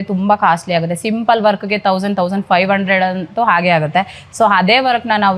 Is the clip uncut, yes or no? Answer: yes